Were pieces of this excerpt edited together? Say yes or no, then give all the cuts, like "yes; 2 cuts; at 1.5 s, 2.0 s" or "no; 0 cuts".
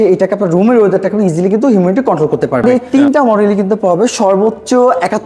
yes; 1 cut; at 2.8 s